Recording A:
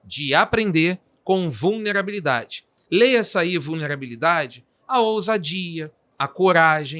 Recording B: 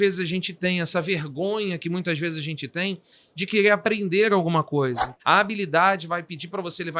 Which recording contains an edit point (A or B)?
B